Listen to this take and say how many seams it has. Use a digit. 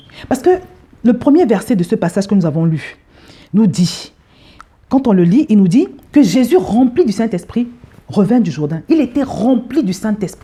0